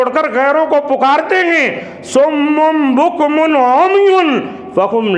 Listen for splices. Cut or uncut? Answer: uncut